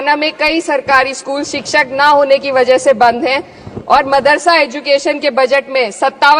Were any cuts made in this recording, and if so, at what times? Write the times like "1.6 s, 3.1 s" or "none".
none